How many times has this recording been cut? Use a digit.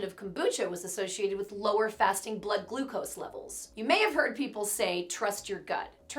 1